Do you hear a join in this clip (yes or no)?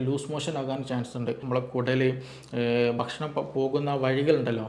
yes